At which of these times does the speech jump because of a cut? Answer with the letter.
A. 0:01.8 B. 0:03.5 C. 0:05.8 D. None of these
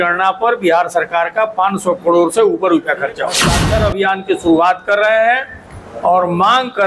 B